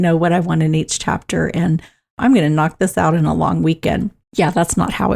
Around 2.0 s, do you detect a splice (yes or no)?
no